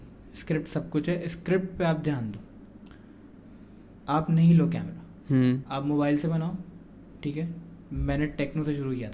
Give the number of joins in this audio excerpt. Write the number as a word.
zero